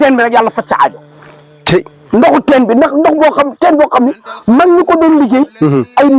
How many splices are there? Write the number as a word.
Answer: zero